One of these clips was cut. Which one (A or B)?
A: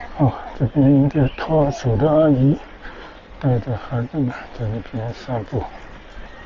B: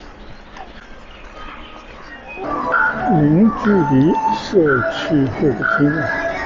B